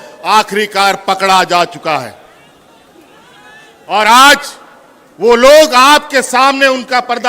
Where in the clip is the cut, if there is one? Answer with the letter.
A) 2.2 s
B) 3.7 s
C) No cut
C